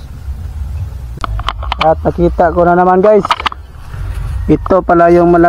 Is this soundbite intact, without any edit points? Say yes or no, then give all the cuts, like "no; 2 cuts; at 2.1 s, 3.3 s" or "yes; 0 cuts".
no; 1 cut; at 1.2 s